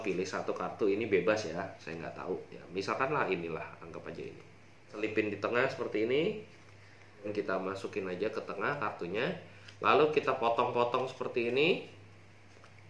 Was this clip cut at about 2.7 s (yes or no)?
no